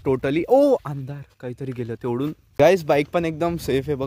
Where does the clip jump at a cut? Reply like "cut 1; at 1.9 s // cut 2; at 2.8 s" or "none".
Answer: cut 1; at 2.4 s